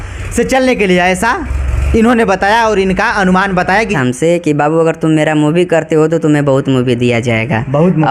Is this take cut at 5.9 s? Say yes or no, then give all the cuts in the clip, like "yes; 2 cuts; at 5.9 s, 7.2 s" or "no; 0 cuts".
no; 1 cut; at 3.9 s